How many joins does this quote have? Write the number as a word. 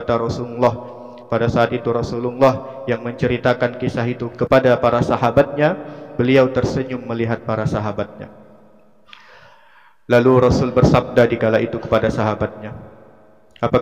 one